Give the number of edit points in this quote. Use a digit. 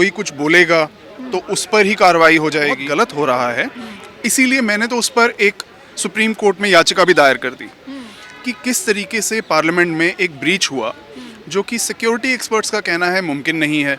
1